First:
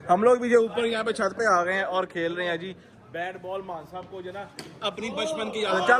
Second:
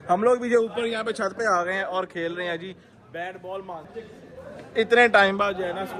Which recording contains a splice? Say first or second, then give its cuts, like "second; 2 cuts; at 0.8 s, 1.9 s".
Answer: second; 1 cut; at 4.0 s